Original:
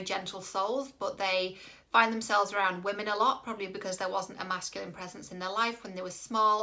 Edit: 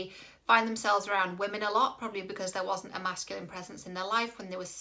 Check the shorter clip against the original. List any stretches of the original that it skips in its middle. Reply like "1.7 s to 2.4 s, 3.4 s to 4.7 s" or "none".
none